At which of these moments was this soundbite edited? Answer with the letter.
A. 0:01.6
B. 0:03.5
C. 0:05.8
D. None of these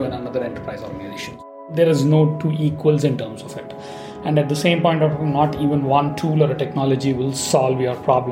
A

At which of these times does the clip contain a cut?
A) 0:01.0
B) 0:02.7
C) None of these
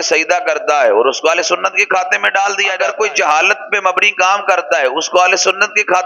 B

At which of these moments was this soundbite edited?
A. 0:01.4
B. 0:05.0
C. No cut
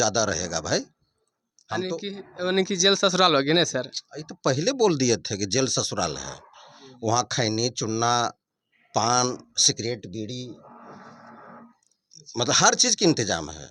C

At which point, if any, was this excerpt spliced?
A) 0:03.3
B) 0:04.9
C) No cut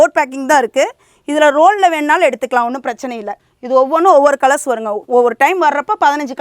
A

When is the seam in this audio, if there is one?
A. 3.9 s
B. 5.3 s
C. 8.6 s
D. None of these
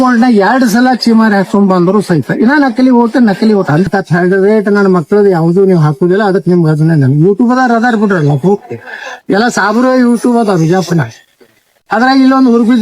A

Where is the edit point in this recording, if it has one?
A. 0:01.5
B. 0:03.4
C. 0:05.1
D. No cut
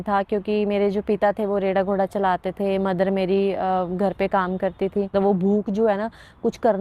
C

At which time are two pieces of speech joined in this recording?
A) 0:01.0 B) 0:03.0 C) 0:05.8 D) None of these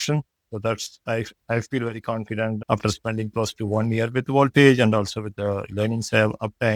D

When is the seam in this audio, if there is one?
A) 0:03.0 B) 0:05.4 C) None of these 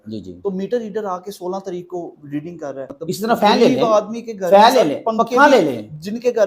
A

